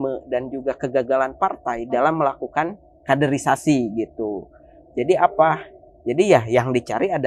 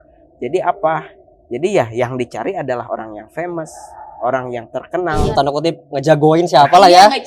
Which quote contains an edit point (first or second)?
second